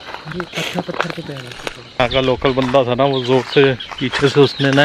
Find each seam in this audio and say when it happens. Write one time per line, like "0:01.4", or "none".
0:02.0